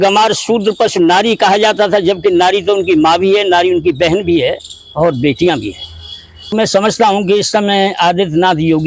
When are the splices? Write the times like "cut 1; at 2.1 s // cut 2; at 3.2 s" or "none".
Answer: cut 1; at 6.5 s